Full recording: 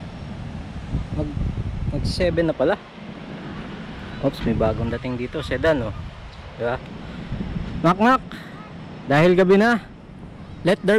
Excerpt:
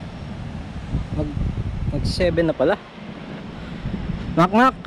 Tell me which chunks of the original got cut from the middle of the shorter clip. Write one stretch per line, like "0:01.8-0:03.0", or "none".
0:03.4-0:06.9